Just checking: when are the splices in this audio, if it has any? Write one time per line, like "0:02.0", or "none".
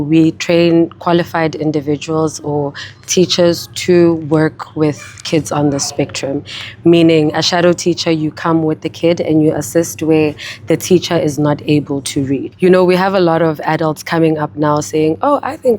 0:12.5